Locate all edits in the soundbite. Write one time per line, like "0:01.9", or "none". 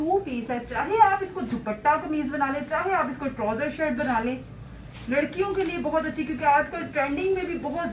none